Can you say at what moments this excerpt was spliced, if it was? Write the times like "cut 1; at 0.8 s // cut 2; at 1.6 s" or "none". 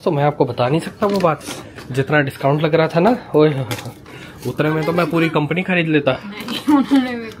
none